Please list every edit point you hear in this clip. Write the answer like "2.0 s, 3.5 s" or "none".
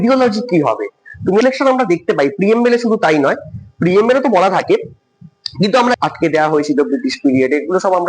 1.4 s, 6.0 s